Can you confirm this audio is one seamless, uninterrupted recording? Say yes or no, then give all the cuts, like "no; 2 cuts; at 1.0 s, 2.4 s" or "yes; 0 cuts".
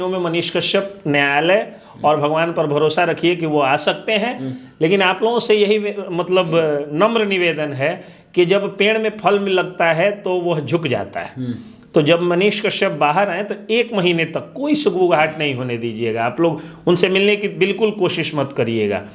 yes; 0 cuts